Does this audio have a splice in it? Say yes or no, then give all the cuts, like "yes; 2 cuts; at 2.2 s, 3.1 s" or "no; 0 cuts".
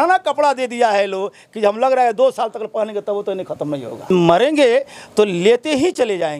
yes; 1 cut; at 4.1 s